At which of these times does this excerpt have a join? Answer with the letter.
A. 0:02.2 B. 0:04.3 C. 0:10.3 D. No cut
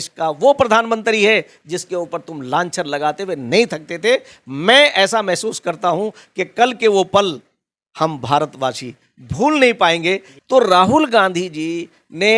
C